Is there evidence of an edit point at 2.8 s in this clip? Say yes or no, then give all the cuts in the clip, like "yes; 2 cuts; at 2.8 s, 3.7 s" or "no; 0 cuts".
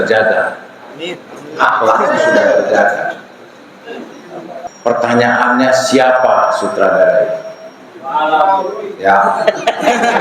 no; 1 cut; at 4.7 s